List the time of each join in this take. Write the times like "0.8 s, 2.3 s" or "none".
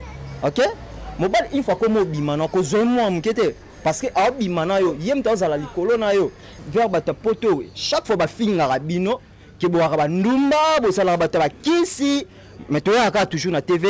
6.6 s